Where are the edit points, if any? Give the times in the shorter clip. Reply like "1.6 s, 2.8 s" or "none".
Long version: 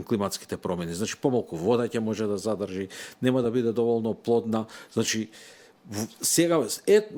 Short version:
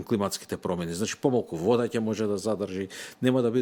none